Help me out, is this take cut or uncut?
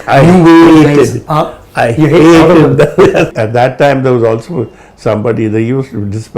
cut